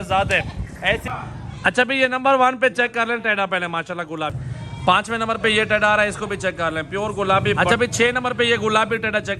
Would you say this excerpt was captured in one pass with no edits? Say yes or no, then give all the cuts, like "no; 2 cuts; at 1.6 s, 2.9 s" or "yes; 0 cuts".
no; 3 cuts; at 1.0 s, 4.4 s, 7.6 s